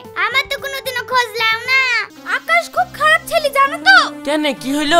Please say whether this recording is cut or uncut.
cut